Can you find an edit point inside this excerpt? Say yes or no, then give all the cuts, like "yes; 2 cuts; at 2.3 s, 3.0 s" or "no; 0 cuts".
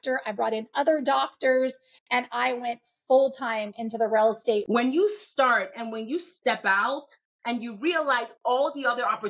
yes; 1 cut; at 4.6 s